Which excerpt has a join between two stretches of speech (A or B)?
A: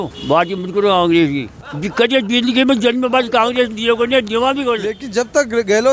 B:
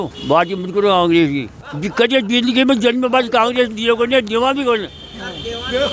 A